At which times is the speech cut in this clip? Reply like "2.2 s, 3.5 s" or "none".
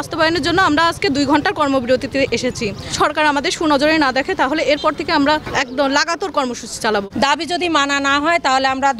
2.9 s, 5.5 s, 7.1 s

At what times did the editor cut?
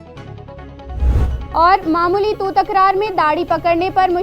none

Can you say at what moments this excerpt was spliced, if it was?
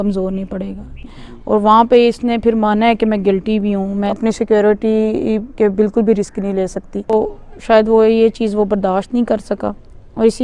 1.1 s, 4.1 s, 7.1 s

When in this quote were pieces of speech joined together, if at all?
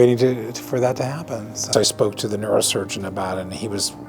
1.7 s

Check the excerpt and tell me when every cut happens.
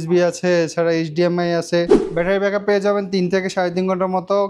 2.0 s

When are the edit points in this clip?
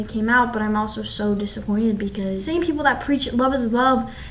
2.4 s

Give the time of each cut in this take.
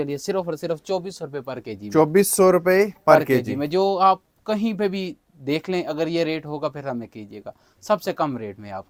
none

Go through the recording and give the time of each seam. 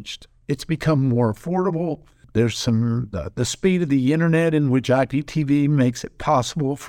2.2 s

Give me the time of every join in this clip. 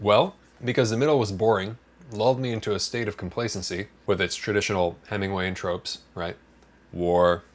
none

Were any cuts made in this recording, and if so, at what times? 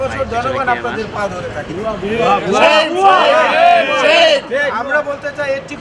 none

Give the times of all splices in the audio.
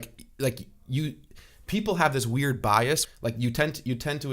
3.0 s

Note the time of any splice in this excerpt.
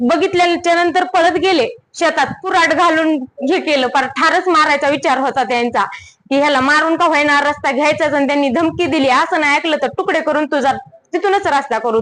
2.4 s

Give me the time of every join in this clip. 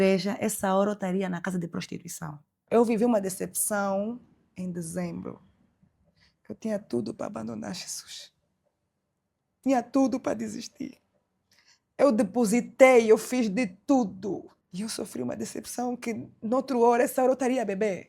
2.6 s, 14.6 s

